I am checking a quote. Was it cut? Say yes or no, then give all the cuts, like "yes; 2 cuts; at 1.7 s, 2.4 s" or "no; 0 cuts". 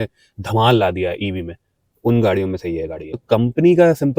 yes; 1 cut; at 3.0 s